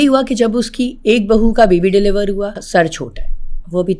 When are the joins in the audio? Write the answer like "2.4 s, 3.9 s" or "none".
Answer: 2.6 s